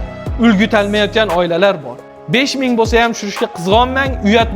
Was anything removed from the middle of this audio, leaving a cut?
yes; 1 cut; at 1.9 s

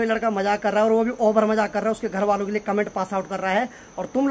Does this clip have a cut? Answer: no; 0 cuts

